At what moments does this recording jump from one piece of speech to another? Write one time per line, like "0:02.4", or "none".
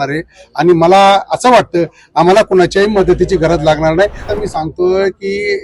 0:04.3